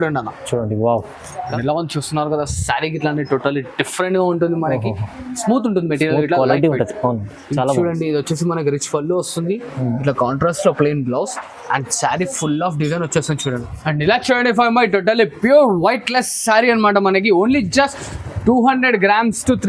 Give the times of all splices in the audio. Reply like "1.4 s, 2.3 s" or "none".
1.4 s, 13.7 s